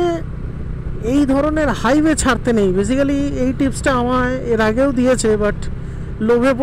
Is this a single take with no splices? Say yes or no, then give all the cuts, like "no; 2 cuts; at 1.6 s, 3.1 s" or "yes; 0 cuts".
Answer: yes; 0 cuts